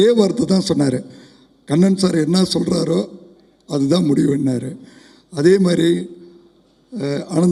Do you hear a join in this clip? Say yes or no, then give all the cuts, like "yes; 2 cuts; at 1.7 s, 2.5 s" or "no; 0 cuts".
no; 0 cuts